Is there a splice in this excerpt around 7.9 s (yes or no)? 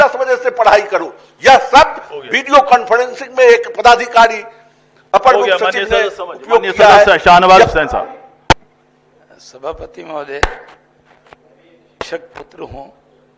no